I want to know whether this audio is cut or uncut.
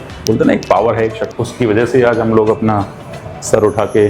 cut